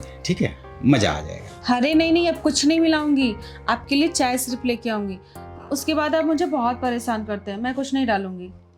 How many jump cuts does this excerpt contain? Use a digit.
0